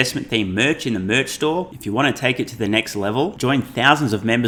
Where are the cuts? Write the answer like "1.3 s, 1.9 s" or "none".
none